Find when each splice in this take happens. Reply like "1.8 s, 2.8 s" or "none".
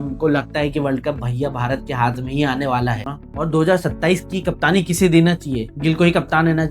3.1 s